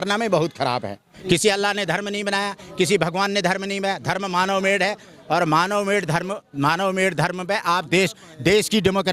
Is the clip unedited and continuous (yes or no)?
no